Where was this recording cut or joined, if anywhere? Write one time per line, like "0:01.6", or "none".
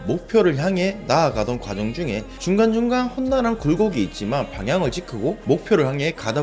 0:02.3
0:05.4